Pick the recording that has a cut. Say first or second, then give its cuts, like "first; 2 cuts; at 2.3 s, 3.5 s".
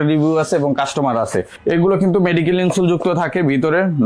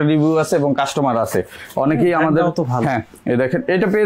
first; 1 cut; at 1.5 s